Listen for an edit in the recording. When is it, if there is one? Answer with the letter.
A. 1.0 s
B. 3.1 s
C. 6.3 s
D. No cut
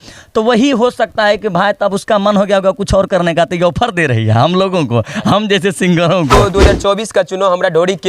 C